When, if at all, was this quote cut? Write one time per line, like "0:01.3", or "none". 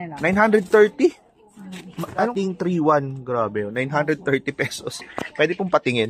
0:02.3